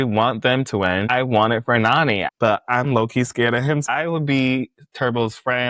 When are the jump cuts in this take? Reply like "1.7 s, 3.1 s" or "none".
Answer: 1.1 s, 2.3 s, 3.9 s